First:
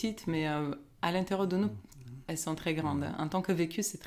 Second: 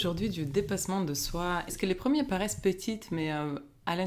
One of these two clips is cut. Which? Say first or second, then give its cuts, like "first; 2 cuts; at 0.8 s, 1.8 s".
second; 1 cut; at 1.7 s